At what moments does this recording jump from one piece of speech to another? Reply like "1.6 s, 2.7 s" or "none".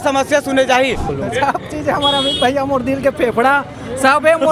1.1 s